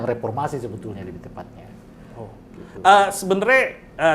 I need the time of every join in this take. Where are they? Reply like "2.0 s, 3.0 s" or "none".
none